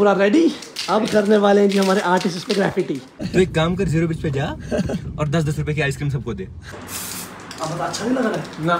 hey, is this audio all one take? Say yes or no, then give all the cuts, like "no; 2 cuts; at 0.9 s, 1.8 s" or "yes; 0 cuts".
no; 2 cuts; at 3.1 s, 6.6 s